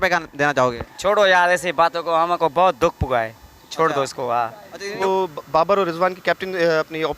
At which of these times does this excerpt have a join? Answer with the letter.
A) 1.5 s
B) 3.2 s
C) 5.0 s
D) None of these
C